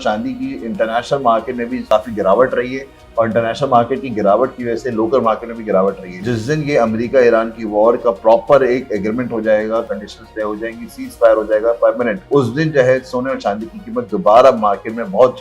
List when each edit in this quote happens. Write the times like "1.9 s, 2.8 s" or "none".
1.9 s, 6.2 s, 12.2 s